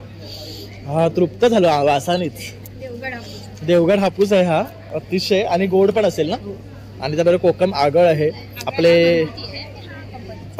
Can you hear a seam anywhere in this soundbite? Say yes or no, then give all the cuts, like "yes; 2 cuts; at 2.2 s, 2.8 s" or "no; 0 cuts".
no; 0 cuts